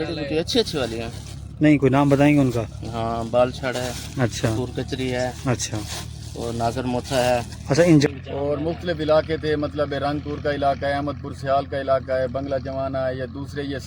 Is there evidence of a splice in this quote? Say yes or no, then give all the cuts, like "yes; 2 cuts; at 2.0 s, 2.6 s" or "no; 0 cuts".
yes; 1 cut; at 8.1 s